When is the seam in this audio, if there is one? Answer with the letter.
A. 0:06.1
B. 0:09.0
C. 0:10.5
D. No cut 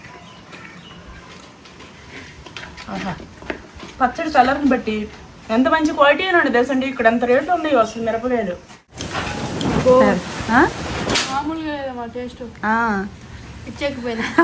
B